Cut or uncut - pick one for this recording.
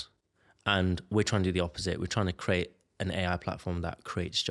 uncut